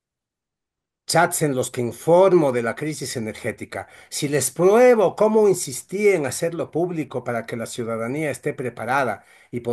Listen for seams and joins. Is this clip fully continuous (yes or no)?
yes